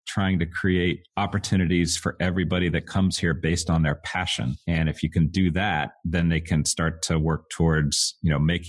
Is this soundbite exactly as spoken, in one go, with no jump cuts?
no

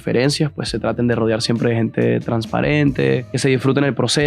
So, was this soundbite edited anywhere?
yes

